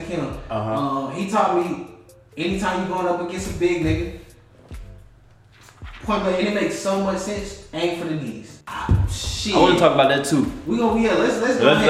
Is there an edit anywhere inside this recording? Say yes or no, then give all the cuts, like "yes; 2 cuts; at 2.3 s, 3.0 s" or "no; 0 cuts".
yes; 1 cut; at 8.6 s